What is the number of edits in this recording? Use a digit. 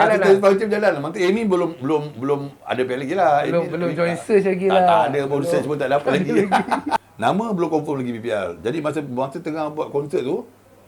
1